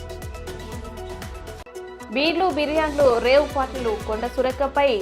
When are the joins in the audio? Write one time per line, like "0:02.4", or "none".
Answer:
0:01.5